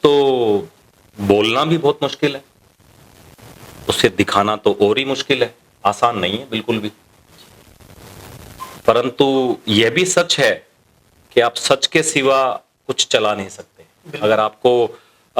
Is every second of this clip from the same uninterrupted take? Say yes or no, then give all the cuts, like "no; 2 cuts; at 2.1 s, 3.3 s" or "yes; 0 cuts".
yes; 0 cuts